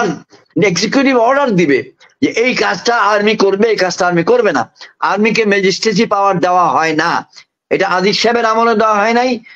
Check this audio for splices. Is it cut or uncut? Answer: uncut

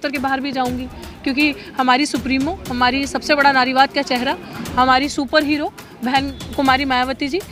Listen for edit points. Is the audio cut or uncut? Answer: uncut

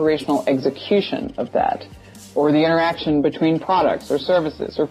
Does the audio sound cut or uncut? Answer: uncut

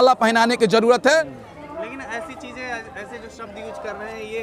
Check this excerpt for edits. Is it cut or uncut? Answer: cut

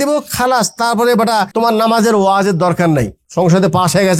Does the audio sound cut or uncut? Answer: cut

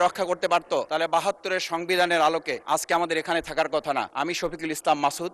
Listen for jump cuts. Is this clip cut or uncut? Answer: cut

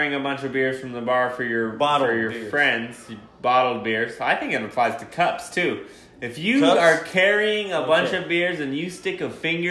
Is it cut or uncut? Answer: uncut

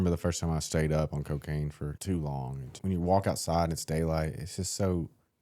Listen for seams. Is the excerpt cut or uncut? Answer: cut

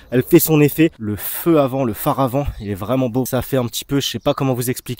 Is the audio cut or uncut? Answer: cut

